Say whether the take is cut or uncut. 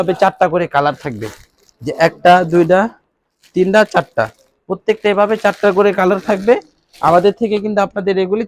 uncut